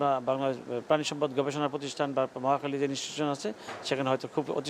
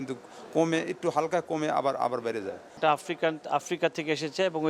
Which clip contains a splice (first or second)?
second